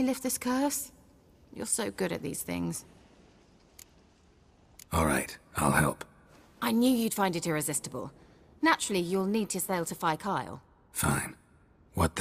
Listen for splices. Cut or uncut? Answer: uncut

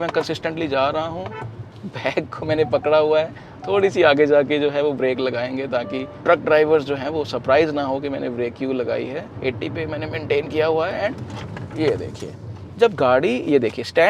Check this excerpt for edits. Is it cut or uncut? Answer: cut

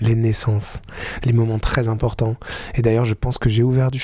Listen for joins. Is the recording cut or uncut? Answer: uncut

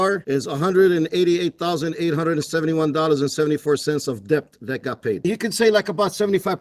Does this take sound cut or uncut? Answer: uncut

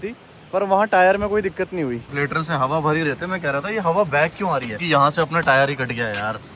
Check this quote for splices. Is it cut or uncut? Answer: cut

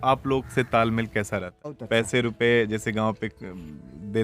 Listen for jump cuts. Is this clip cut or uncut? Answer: cut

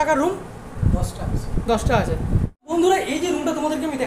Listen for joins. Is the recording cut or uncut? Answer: cut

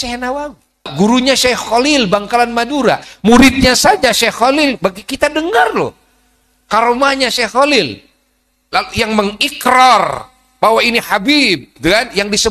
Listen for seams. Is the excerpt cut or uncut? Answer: cut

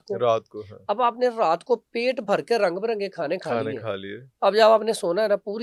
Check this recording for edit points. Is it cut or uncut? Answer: uncut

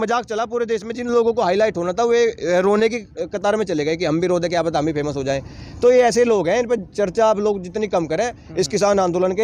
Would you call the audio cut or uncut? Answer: uncut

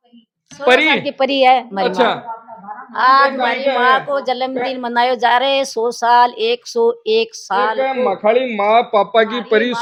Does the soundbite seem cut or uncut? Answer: uncut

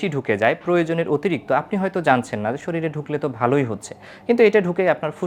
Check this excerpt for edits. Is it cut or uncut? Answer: uncut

